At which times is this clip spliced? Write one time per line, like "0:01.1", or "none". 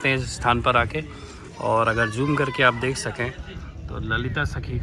none

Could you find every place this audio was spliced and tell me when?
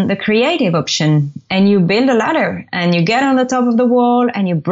none

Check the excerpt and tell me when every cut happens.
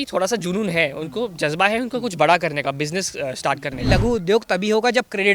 0:03.9

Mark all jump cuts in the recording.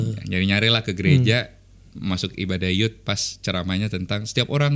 none

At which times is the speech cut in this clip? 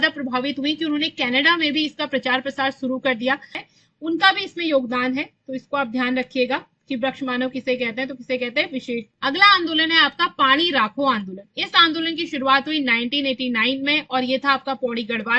0:03.7
0:09.1

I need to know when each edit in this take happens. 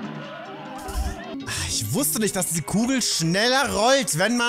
0:01.3

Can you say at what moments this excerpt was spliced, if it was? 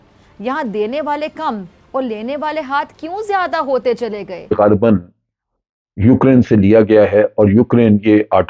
0:04.5

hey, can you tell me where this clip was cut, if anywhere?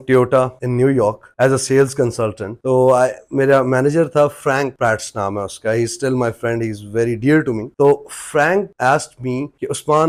none

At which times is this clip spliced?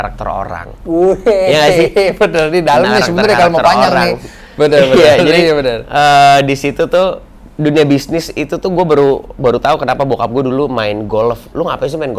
none

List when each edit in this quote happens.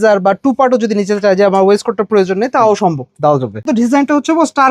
0:03.7

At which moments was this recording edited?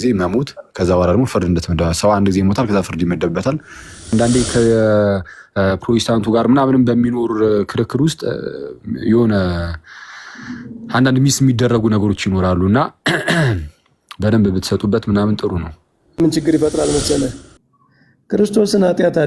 0:04.1
0:16.2

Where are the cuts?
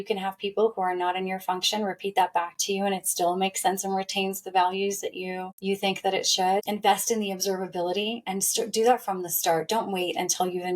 0:05.5
0:06.7

